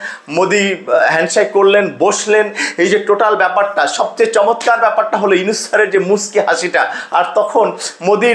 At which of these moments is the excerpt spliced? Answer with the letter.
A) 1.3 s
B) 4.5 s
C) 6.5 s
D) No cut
D